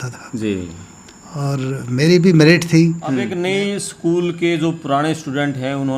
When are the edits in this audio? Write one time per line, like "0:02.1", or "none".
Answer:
0:03.0